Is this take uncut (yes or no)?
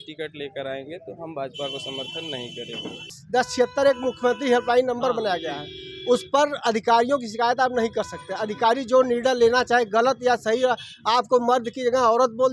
no